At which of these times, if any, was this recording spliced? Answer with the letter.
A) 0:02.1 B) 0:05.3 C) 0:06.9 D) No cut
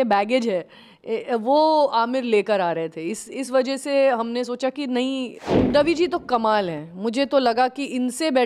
B